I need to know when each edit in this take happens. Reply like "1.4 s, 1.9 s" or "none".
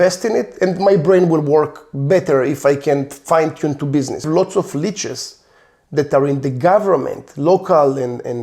4.2 s